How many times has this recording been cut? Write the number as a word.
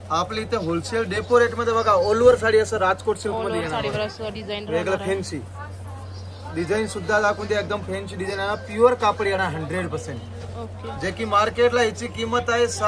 zero